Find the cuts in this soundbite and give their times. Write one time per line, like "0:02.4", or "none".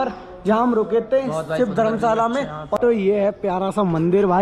0:02.6